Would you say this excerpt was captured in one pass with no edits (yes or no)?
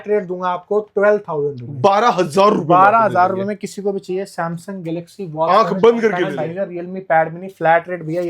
no